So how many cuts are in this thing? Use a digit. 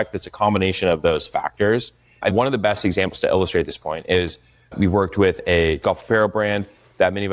2